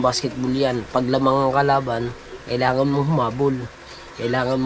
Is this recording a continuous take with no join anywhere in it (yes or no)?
yes